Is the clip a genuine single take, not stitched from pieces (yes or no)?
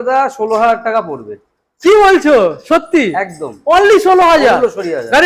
yes